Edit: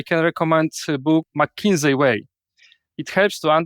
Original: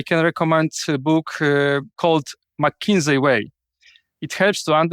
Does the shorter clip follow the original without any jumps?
no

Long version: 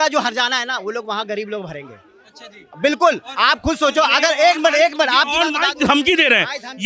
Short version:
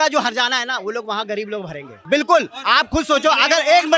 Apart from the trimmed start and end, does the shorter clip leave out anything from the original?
yes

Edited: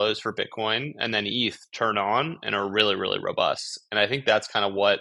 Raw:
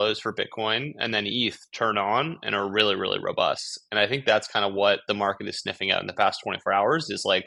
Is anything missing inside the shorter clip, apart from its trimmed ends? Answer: no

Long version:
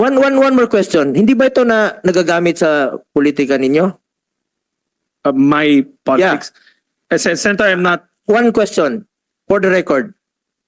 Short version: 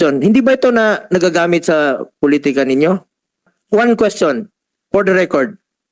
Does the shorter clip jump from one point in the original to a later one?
yes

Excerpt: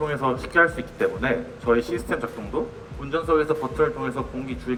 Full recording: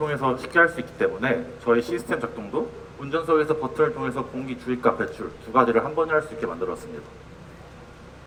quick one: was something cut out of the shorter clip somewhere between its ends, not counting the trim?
no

